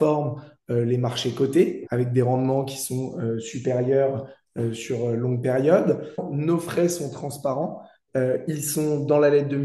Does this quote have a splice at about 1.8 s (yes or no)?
yes